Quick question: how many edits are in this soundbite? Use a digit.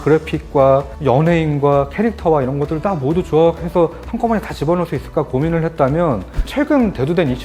1